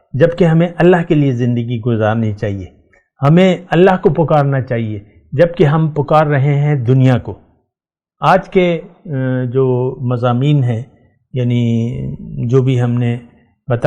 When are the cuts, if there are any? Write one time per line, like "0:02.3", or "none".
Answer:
none